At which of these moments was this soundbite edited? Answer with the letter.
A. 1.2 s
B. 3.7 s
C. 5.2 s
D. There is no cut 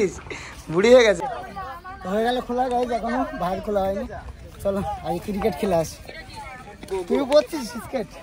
A